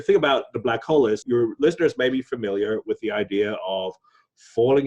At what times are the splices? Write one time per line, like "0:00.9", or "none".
0:01.2